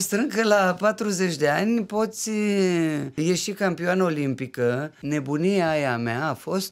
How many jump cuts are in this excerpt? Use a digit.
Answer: 2